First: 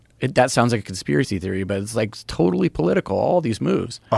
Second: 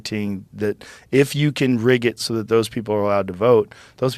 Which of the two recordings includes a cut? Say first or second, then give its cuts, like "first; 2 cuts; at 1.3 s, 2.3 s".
first; 1 cut; at 1.0 s